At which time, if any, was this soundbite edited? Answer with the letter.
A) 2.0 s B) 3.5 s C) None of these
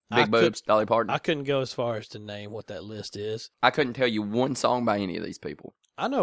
B